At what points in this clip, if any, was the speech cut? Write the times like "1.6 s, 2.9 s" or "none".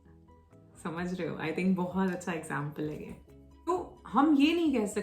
3.7 s